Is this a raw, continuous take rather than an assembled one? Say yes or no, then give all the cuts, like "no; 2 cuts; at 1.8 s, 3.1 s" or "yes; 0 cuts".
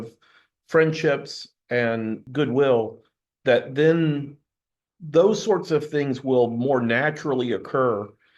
no; 1 cut; at 2.2 s